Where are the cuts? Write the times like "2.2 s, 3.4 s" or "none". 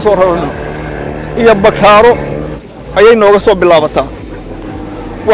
none